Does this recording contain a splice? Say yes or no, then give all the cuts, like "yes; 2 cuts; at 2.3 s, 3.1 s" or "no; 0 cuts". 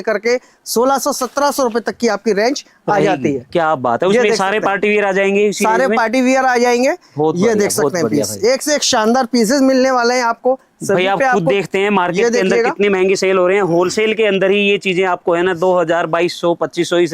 no; 0 cuts